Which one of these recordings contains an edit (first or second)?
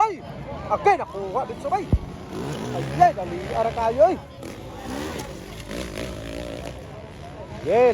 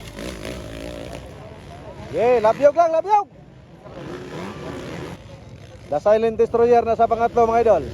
second